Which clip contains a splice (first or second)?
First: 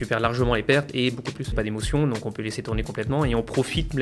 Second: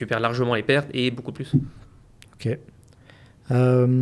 first